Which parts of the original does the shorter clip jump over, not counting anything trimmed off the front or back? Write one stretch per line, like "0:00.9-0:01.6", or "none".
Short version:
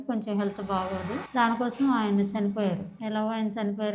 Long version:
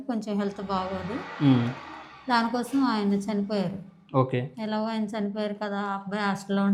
0:01.2-0:02.1
0:03.9-0:04.5